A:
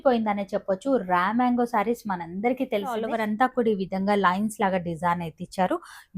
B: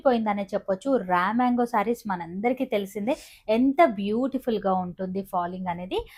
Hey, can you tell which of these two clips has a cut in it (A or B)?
A